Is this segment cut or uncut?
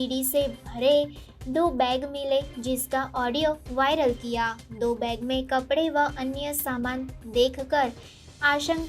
uncut